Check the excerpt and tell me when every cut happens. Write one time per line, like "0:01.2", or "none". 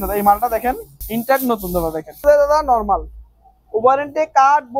0:00.9
0:02.2